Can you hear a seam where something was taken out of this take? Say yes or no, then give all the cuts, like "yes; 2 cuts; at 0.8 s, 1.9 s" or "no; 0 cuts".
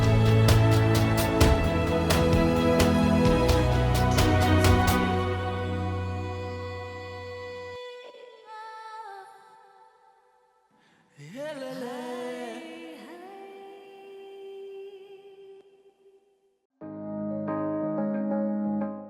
yes; 1 cut; at 16.6 s